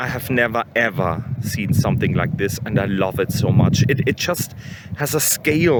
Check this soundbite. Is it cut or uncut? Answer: uncut